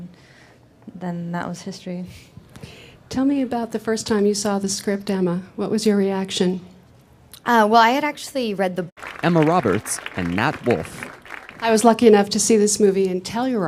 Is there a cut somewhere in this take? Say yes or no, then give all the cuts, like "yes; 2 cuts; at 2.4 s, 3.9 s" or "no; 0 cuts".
no; 0 cuts